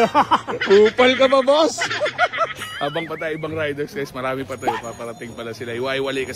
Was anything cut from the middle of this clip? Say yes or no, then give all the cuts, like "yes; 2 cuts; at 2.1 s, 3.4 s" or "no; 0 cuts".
no; 0 cuts